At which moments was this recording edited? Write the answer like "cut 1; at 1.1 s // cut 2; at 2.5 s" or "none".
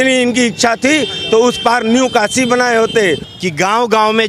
cut 1; at 3.3 s